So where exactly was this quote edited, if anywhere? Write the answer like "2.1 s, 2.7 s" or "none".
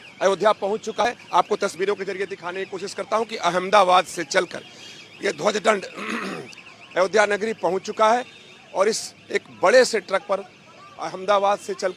1.0 s